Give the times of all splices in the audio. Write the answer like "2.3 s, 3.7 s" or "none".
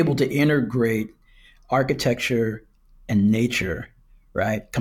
none